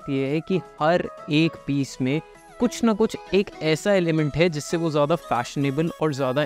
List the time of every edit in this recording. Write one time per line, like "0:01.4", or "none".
none